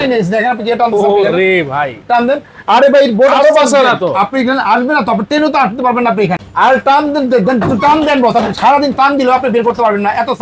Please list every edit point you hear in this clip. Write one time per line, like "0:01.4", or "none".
0:06.4